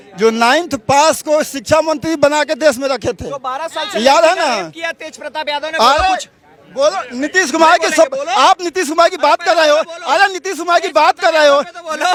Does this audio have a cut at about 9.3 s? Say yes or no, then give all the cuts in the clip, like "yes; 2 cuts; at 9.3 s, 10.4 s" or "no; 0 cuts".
no; 0 cuts